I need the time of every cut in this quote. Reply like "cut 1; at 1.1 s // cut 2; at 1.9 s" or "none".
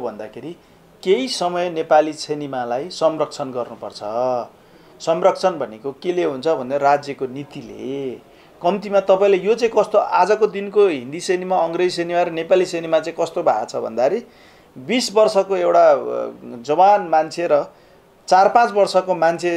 none